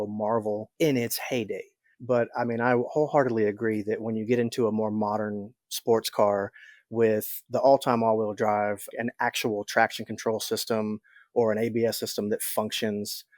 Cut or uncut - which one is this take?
cut